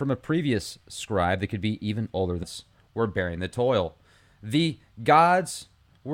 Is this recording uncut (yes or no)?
yes